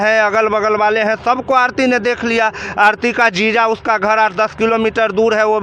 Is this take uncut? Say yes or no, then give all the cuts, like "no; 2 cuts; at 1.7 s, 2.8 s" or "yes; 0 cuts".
yes; 0 cuts